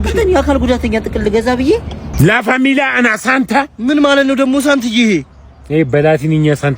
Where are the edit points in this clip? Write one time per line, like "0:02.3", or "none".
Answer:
0:02.0